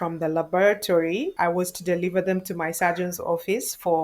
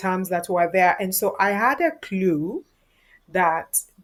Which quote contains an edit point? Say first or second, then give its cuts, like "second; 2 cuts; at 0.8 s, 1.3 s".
first; 1 cut; at 1.3 s